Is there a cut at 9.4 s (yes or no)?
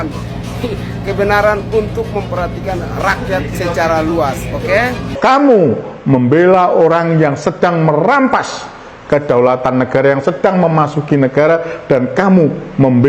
no